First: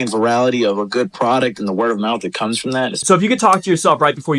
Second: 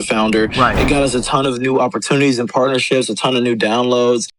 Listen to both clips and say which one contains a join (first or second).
first